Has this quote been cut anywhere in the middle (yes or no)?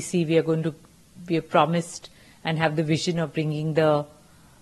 no